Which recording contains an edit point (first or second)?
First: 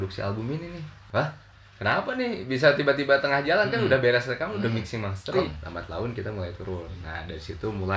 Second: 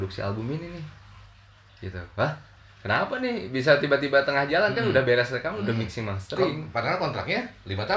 first